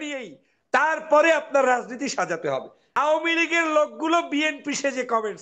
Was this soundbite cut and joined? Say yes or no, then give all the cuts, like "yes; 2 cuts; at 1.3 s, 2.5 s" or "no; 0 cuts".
yes; 1 cut; at 2.8 s